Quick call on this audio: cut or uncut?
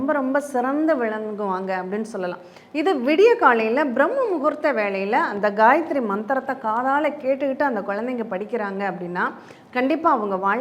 uncut